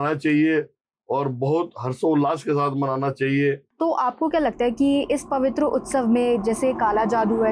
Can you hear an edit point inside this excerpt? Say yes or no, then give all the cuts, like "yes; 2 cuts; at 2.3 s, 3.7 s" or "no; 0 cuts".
yes; 1 cut; at 3.7 s